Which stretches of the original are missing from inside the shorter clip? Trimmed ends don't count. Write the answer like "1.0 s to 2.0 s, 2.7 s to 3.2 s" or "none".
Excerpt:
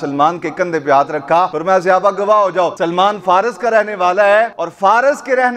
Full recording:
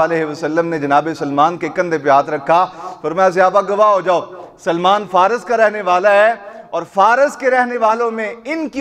2.7 s to 3.1 s, 4.3 s to 4.6 s, 6.5 s to 6.8 s